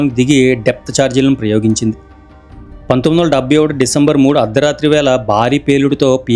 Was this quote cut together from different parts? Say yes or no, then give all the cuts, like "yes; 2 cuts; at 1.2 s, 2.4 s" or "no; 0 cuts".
no; 0 cuts